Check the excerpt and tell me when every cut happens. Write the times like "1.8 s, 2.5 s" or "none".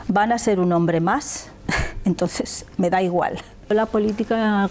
3.7 s

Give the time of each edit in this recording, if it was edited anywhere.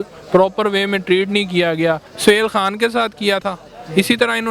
2.1 s

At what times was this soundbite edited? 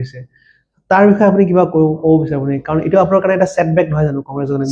none

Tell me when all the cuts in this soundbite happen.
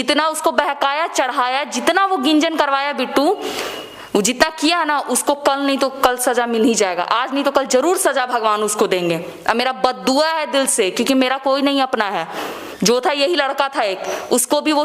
none

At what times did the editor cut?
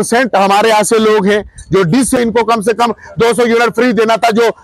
2.2 s

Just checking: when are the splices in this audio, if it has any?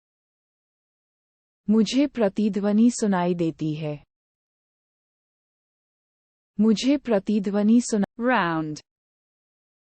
8.1 s

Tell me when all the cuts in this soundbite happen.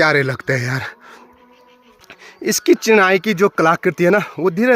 none

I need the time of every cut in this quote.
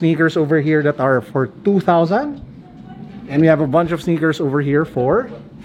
none

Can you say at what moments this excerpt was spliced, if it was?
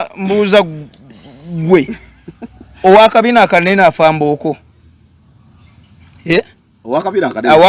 none

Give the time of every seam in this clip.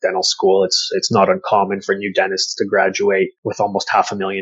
3.4 s

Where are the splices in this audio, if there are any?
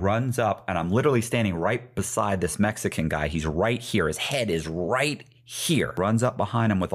5.9 s

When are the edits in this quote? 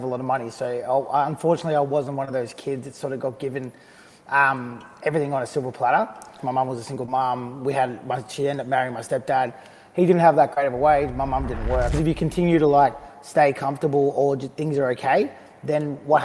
6.4 s, 12.0 s

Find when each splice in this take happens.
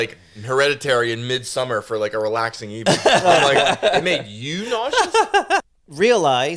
5.6 s

